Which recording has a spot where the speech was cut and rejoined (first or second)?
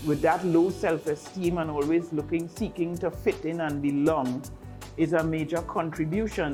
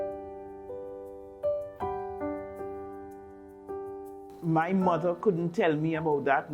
second